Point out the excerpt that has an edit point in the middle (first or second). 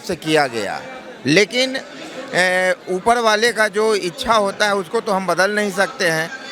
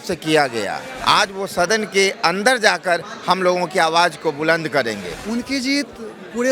second